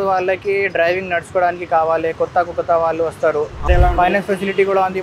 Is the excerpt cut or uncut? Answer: cut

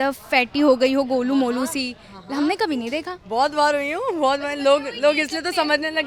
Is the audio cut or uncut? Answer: uncut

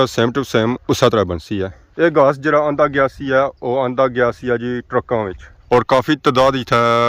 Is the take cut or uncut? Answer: uncut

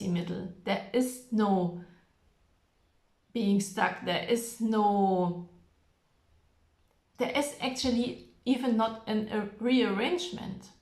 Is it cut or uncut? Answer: uncut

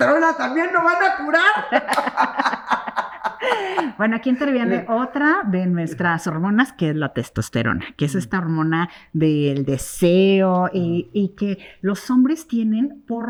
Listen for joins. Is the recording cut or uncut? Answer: uncut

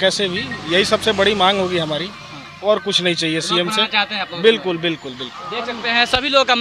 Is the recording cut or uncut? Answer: uncut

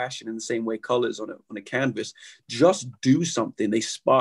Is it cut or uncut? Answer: uncut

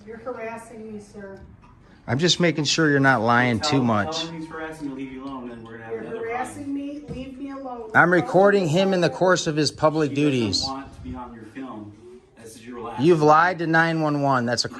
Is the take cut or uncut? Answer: uncut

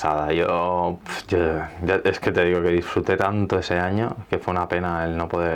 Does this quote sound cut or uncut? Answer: uncut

